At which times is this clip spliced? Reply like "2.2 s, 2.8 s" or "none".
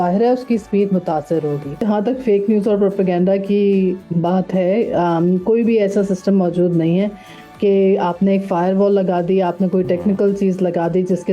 1.8 s